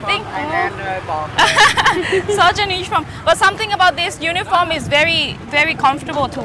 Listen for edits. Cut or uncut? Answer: uncut